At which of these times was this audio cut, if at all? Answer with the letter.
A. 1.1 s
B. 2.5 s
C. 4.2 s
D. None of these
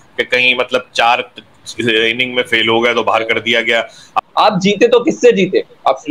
C